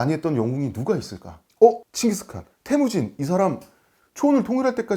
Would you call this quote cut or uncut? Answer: cut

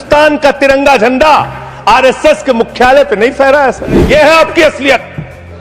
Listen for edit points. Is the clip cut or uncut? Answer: cut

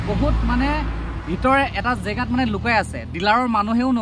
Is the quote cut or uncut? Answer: uncut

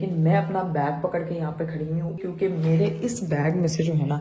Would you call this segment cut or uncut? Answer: cut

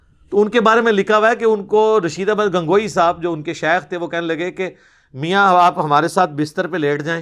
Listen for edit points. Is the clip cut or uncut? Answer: uncut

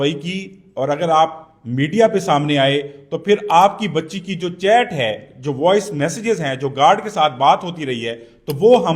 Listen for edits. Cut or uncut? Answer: uncut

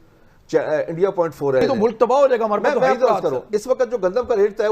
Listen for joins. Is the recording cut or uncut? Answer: cut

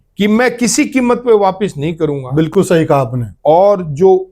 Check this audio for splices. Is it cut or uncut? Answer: uncut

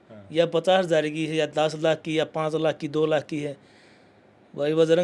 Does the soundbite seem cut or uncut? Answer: uncut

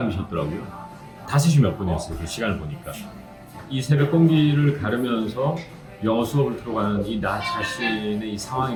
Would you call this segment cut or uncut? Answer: uncut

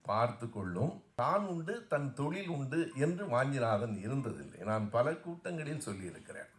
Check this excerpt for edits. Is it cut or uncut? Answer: cut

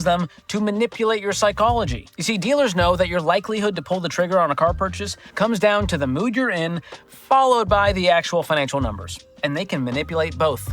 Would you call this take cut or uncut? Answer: cut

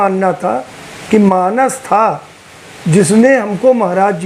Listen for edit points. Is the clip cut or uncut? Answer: uncut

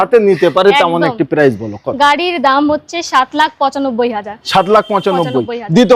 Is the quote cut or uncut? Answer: uncut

